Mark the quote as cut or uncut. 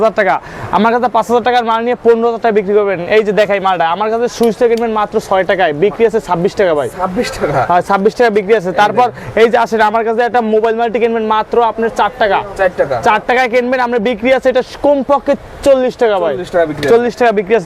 uncut